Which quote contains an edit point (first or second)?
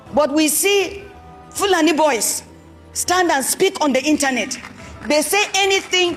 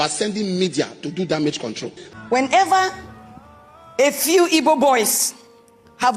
second